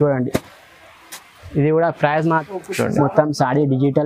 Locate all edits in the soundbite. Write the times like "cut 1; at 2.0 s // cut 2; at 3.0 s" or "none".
cut 1; at 2.4 s

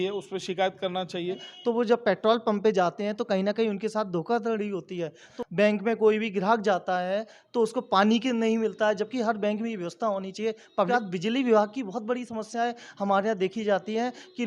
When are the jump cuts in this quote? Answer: cut 1; at 1.5 s // cut 2; at 5.3 s // cut 3; at 10.9 s

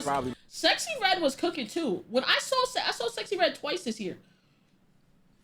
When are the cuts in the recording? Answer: none

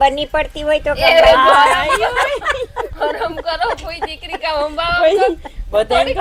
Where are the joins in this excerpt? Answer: none

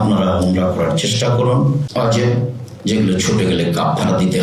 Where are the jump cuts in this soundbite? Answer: cut 1; at 1.9 s

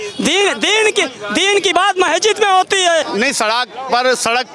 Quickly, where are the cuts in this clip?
cut 1; at 3.1 s

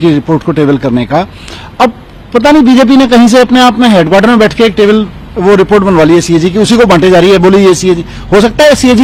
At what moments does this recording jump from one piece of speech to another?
none

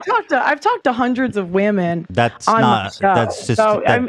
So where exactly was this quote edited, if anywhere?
none

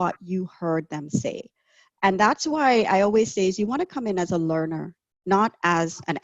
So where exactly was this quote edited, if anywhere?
none

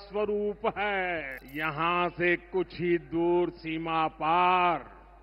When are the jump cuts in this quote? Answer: cut 1; at 1.4 s

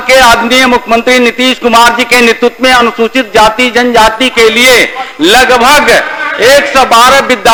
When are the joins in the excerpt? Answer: none

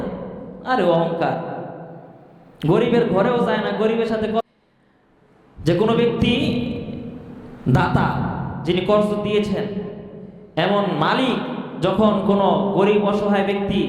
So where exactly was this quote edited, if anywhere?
cut 1; at 4.4 s

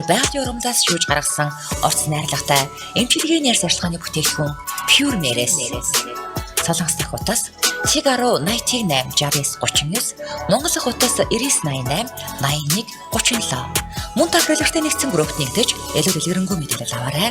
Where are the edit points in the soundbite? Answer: none

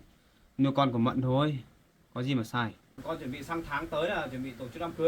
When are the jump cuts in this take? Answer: cut 1; at 2.9 s

